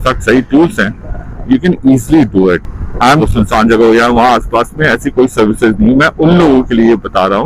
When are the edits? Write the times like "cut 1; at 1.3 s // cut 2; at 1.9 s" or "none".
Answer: cut 1; at 3.3 s